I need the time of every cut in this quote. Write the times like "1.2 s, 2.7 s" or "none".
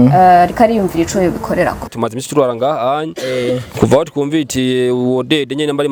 none